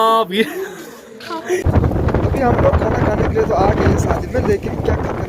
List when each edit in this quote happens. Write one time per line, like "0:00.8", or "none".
0:01.6